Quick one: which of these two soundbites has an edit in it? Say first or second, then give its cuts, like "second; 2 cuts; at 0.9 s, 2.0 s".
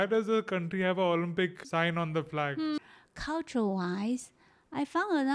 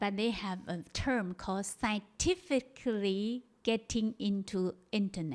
first; 2 cuts; at 1.6 s, 2.8 s